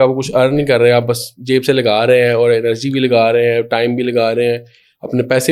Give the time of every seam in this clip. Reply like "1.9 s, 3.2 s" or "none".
none